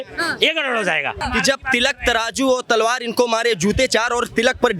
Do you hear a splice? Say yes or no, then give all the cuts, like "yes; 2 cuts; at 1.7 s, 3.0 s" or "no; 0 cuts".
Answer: yes; 1 cut; at 1.2 s